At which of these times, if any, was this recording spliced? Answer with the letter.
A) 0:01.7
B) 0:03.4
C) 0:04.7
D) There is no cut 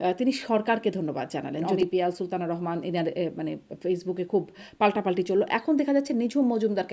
A